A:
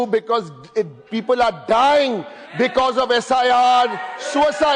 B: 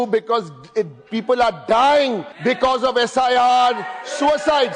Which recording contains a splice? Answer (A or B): B